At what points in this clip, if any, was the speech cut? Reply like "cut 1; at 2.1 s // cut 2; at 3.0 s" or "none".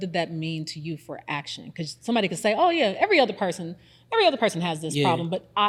none